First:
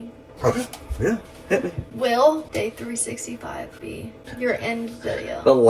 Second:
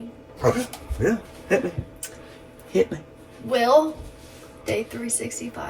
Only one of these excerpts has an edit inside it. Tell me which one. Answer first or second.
first